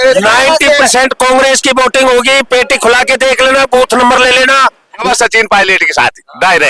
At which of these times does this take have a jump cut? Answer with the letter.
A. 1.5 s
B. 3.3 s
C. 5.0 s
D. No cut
C